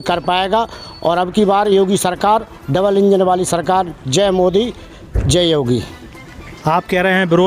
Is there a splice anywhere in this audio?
no; 0 cuts

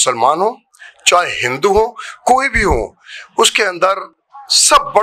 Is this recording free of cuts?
yes; 0 cuts

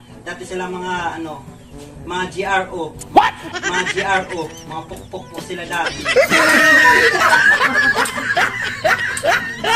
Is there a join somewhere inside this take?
no; 0 cuts

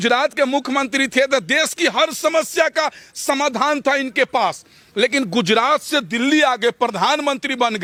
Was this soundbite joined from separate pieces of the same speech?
no; 0 cuts

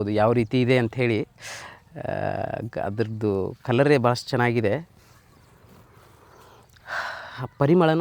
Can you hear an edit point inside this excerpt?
no; 0 cuts

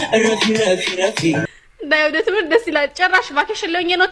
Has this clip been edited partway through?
yes; 1 cut; at 1.4 s

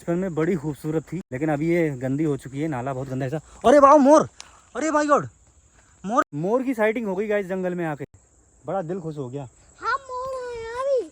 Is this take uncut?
no; 2 cuts; at 1.2 s, 6.3 s

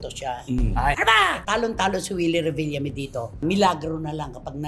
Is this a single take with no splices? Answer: no; 1 cut; at 1.0 s

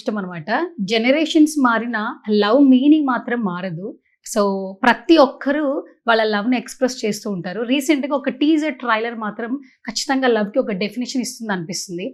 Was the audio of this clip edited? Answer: no; 0 cuts

